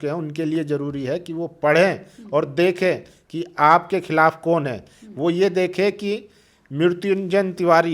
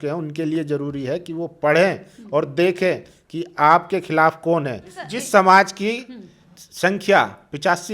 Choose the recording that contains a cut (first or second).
second